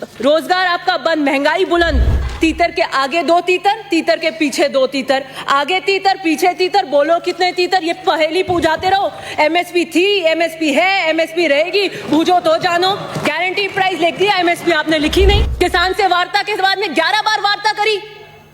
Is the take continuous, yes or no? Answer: no